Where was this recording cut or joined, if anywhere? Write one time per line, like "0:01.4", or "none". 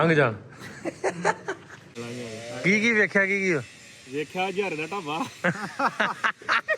0:01.9